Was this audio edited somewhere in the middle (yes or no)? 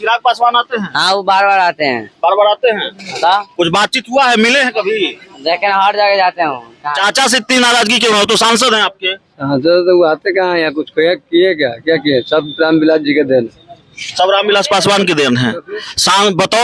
yes